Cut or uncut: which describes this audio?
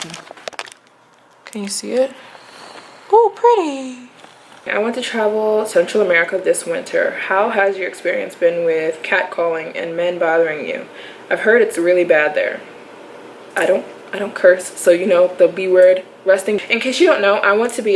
cut